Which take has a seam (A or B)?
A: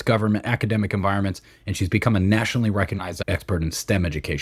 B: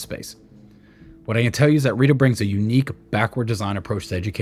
A